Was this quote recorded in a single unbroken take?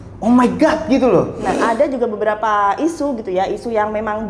no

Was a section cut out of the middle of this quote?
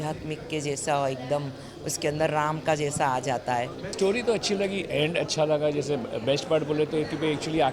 yes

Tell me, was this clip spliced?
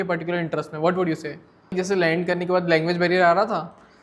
yes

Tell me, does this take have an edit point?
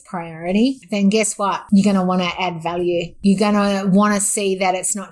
yes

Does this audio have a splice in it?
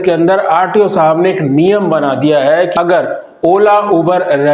yes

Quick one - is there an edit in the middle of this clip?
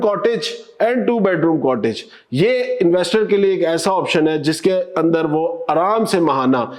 no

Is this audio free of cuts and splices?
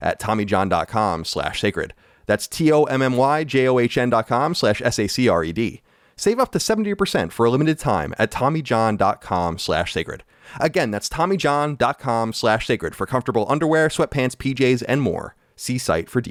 yes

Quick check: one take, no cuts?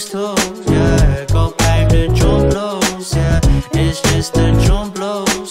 no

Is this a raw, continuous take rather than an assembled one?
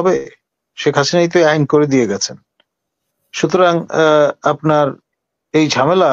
yes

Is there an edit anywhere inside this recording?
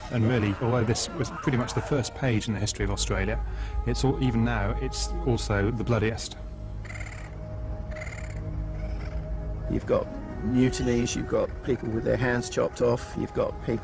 no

